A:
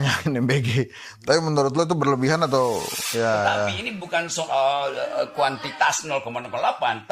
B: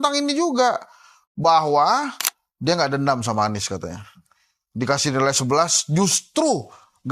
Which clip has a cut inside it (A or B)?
A